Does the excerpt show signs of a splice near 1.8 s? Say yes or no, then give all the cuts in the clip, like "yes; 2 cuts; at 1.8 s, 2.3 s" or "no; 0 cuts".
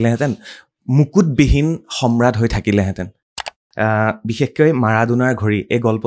no; 1 cut; at 3.3 s